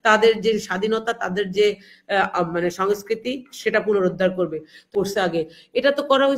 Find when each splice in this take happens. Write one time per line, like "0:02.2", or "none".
0:04.8